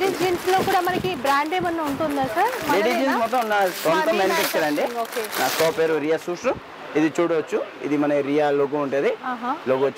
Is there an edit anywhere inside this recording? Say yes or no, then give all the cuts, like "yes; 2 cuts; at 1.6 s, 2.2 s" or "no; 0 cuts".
no; 0 cuts